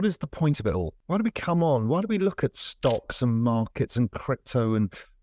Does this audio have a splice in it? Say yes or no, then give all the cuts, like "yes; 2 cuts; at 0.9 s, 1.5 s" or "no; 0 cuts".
yes; 1 cut; at 1.0 s